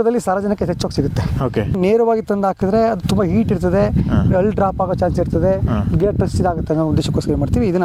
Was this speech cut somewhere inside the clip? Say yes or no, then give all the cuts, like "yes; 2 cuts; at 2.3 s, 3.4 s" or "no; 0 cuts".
no; 0 cuts